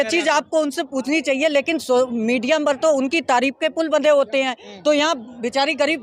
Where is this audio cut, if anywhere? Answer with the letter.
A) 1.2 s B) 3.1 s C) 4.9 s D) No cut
D